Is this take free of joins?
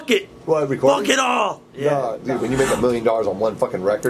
no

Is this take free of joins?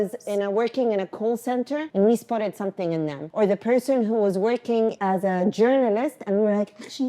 no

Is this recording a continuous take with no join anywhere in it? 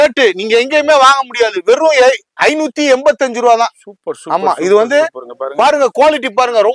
yes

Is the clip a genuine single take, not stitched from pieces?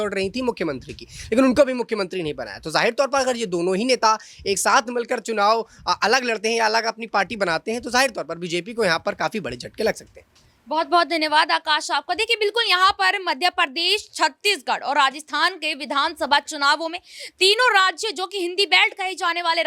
yes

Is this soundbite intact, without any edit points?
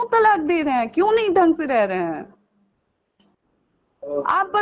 yes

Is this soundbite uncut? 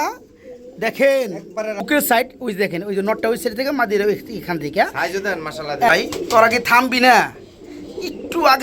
no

